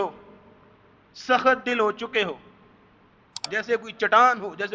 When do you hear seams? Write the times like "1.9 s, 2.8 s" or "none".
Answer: 3.5 s